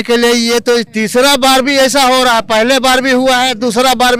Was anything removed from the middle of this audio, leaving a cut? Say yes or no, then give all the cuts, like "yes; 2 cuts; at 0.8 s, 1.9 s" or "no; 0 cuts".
no; 0 cuts